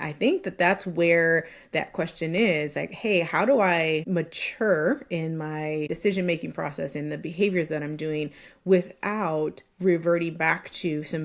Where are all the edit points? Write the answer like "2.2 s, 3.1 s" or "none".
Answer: 4.1 s, 5.9 s